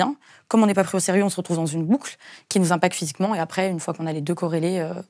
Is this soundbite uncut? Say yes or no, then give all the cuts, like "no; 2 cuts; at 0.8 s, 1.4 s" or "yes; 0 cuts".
yes; 0 cuts